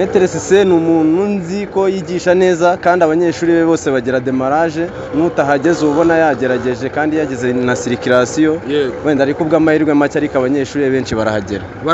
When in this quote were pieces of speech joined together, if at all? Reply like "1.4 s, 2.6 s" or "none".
none